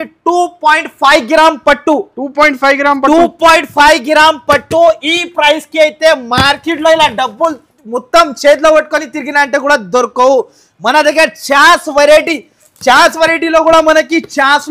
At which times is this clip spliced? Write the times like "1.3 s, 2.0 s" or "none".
none

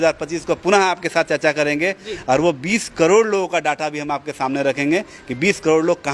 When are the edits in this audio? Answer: none

